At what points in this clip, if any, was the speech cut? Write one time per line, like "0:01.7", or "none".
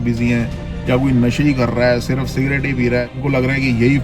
0:03.1